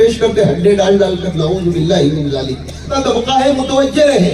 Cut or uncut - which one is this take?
cut